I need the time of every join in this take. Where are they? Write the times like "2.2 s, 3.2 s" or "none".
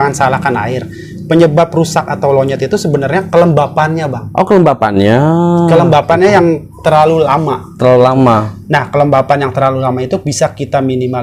none